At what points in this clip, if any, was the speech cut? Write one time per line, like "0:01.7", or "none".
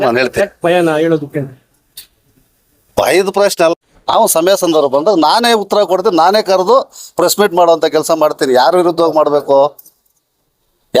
0:03.7